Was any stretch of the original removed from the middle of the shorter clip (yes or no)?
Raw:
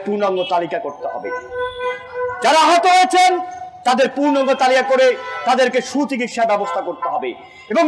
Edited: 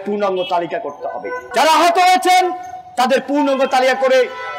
yes